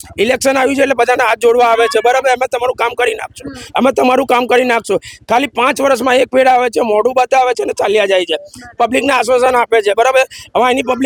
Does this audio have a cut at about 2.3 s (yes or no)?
no